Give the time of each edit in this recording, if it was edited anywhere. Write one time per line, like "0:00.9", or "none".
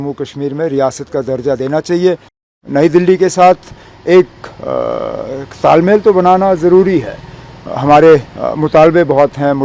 0:02.5